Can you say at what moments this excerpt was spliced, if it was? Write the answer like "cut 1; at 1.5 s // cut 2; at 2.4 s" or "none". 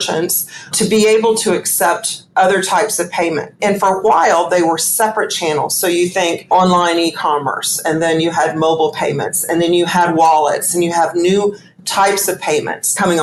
none